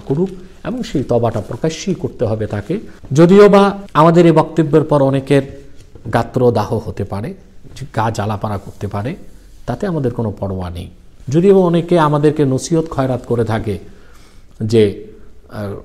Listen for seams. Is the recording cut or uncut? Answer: cut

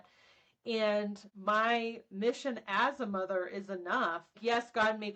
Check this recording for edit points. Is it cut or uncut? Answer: uncut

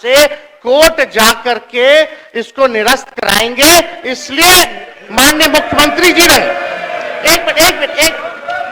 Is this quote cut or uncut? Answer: uncut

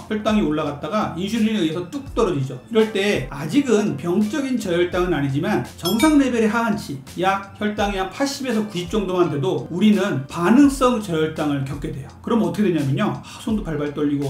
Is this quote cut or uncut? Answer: uncut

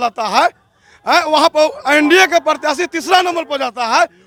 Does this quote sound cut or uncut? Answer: uncut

